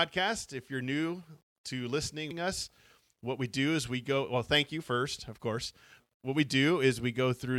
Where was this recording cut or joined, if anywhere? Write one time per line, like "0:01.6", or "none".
0:02.3
0:06.0